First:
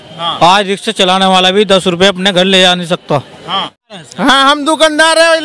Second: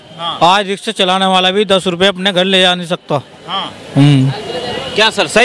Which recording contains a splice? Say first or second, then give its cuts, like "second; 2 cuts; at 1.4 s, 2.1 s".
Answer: first; 1 cut; at 3.9 s